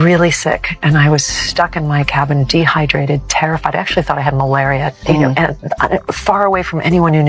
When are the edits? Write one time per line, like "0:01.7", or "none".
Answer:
none